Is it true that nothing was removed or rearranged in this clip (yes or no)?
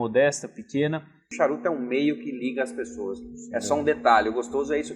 no